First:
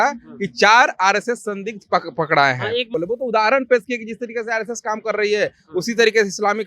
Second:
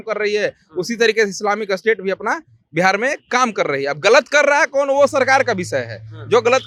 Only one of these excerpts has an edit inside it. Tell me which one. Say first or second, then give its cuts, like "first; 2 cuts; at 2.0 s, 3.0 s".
first; 1 cut; at 2.9 s